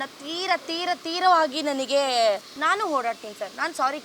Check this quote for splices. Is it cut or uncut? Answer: cut